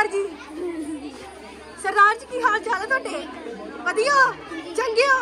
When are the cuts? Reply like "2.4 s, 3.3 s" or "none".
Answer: none